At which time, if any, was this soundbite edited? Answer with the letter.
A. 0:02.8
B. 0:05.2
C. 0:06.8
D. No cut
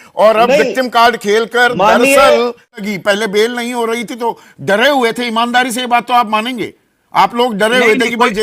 A